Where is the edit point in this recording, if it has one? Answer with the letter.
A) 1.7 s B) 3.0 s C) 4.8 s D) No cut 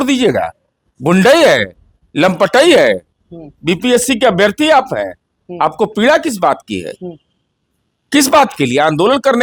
D